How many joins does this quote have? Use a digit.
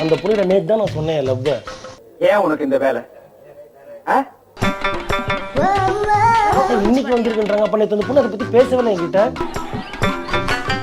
0